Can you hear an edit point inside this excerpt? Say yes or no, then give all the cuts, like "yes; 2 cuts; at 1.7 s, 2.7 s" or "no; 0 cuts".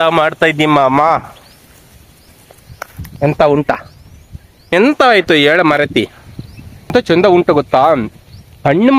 yes; 2 cuts; at 4.7 s, 6.9 s